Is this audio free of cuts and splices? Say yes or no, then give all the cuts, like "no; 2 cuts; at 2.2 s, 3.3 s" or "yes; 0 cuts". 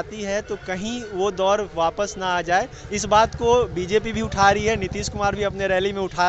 yes; 0 cuts